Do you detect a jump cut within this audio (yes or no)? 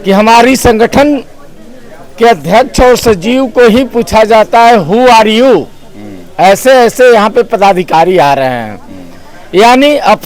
no